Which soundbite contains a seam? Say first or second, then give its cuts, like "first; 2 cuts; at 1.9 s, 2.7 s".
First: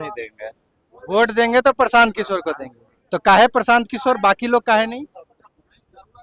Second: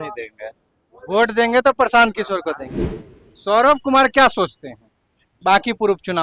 second; 1 cut; at 2.9 s